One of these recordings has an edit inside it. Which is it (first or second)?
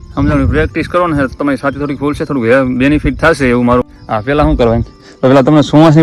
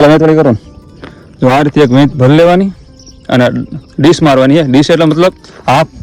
first